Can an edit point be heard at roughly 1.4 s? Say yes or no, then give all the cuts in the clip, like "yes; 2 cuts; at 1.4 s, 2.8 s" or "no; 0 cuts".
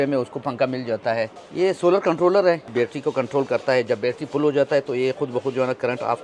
yes; 2 cuts; at 1.4 s, 2.7 s